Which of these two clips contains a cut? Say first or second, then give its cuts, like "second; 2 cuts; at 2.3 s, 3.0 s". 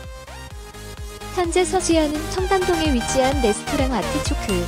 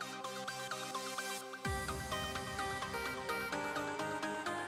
first; 1 cut; at 1.4 s